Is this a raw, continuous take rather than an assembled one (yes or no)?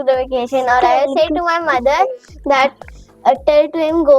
yes